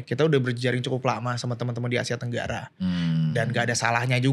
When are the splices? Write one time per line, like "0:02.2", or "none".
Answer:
none